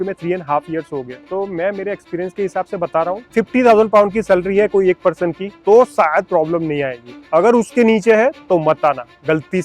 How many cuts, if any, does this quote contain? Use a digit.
3